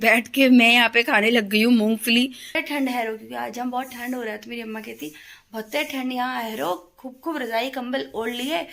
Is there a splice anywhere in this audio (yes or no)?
yes